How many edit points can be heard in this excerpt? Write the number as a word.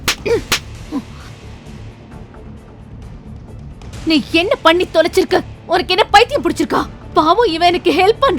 one